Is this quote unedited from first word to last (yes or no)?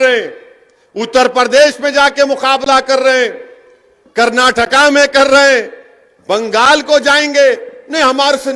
yes